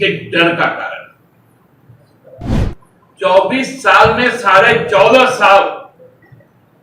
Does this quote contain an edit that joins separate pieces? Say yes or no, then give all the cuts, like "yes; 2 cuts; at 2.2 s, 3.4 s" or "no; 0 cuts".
yes; 1 cut; at 2.5 s